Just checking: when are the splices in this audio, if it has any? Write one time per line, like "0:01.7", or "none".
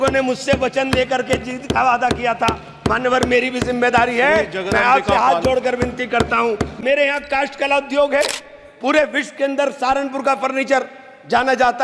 0:06.8